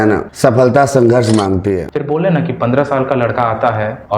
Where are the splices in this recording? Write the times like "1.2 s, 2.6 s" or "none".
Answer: 1.9 s